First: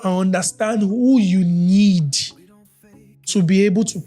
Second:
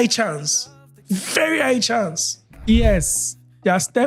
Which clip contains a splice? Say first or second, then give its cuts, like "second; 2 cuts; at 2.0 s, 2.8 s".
second; 1 cut; at 2.7 s